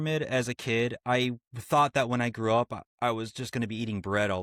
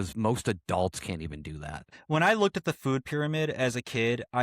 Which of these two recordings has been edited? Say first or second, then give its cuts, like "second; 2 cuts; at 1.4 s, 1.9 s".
second; 1 cut; at 1.9 s